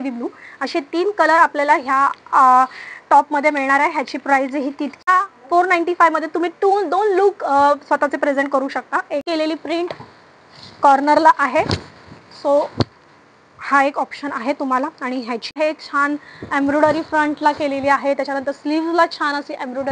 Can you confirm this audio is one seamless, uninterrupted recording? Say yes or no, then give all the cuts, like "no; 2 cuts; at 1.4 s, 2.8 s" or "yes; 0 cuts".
no; 3 cuts; at 5.1 s, 9.2 s, 15.6 s